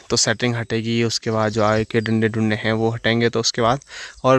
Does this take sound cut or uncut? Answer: uncut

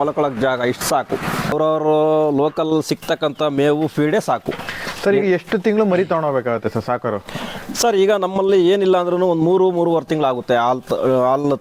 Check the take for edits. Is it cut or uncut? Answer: uncut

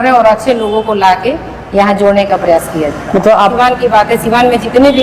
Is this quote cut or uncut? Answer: cut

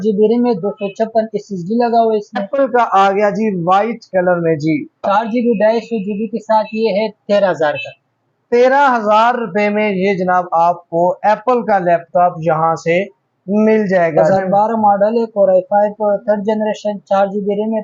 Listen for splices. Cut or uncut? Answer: cut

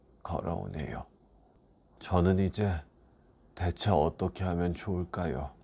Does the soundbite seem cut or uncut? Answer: cut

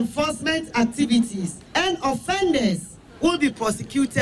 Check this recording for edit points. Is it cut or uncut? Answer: cut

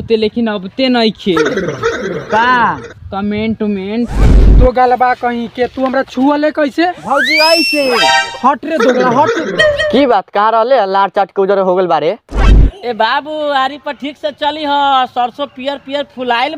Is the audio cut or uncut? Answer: cut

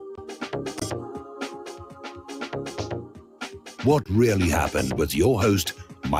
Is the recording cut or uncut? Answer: uncut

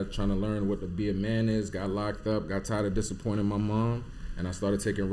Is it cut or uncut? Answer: uncut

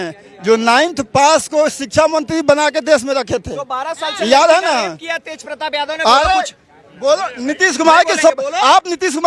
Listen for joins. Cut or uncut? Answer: uncut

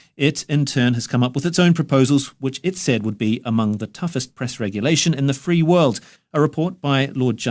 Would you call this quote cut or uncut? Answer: cut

